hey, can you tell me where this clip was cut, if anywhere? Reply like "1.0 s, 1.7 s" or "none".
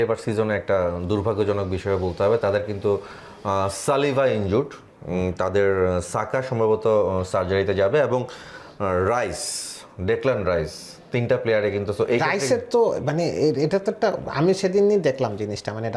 none